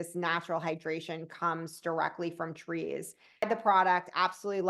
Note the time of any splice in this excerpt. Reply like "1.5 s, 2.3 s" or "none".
3.4 s